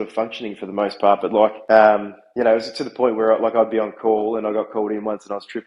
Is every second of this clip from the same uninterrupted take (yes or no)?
no